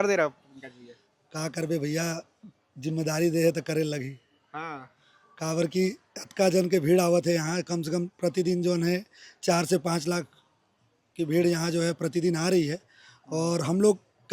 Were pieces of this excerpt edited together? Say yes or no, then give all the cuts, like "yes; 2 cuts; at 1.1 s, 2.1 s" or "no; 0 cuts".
no; 0 cuts